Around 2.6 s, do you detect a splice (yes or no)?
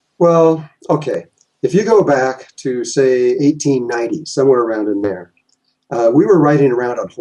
no